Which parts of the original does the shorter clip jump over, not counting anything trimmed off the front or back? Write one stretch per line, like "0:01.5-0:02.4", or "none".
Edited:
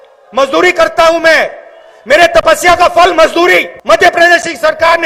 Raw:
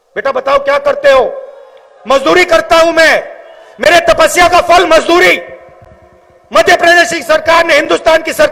0:05.5-0:06.4